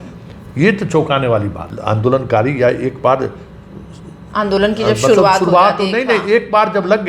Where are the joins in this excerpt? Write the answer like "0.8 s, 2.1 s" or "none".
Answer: 1.6 s